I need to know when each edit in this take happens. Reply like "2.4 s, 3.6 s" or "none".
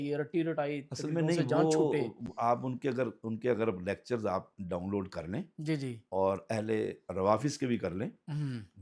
none

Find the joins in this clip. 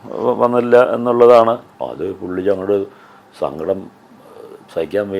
1.6 s

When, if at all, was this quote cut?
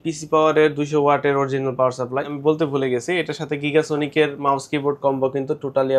2.3 s

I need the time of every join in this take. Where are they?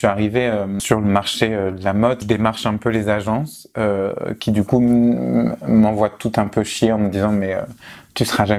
0.8 s, 2.2 s

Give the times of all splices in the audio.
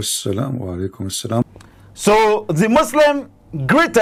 none

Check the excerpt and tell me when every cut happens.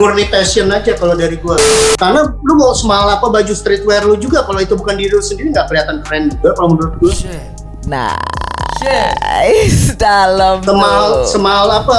2.0 s

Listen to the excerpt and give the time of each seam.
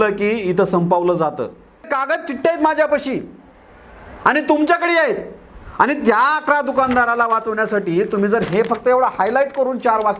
1.9 s

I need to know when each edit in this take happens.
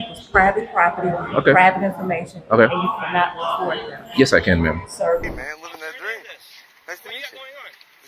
5.3 s

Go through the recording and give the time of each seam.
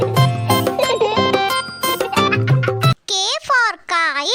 2.9 s

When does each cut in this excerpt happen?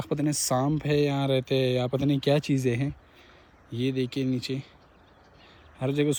none

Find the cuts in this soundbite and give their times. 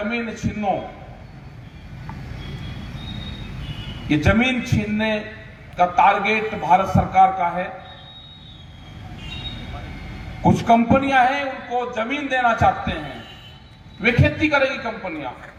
none

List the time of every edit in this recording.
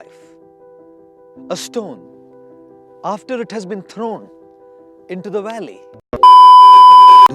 6.0 s

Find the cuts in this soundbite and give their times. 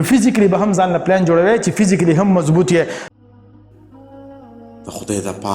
3.0 s

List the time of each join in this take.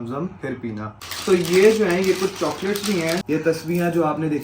1.0 s, 3.2 s

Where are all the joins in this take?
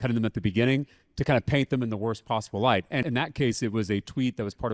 1.2 s, 3.0 s

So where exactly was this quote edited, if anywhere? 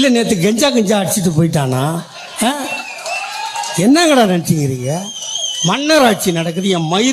none

